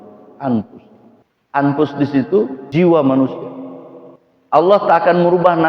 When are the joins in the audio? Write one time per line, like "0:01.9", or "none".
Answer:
0:02.6

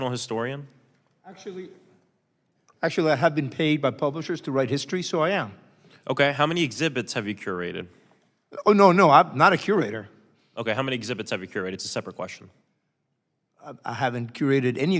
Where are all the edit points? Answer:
none

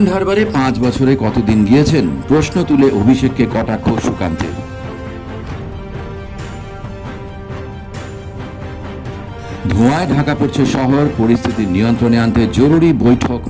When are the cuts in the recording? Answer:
none

